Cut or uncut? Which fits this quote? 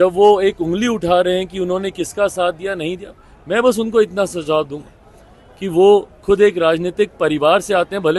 uncut